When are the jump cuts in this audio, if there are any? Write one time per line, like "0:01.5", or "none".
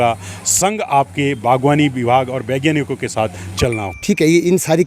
0:03.9